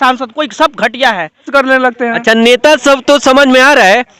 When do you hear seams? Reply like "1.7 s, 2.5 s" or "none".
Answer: 1.5 s